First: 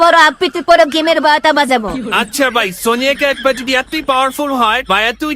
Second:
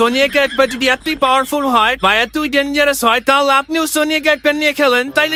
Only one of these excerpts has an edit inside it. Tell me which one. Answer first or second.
first